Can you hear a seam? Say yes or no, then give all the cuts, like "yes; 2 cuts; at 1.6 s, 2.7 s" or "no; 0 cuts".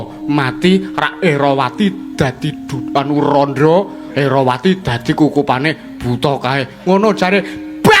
no; 0 cuts